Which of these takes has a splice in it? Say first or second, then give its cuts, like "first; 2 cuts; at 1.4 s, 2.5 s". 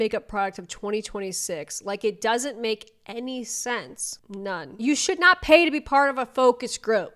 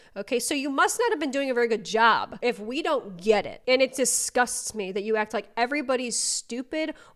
first; 1 cut; at 4.8 s